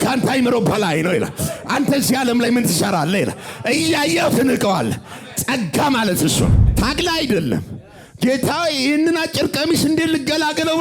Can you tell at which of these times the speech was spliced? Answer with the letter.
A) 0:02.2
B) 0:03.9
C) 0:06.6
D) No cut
C